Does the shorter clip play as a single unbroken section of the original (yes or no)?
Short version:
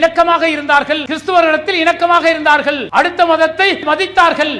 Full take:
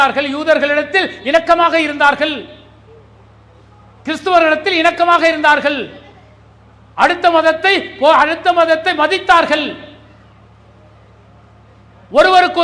no